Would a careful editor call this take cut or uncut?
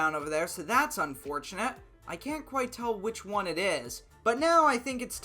cut